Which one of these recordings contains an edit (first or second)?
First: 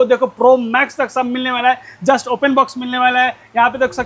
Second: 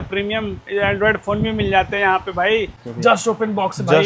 second